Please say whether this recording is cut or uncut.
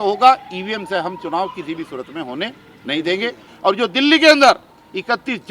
cut